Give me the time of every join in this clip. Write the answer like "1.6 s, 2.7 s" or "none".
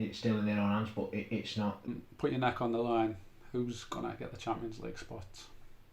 2.0 s